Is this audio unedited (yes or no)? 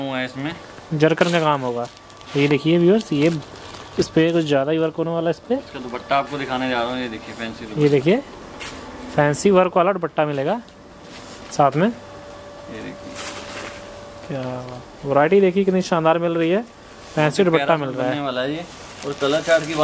yes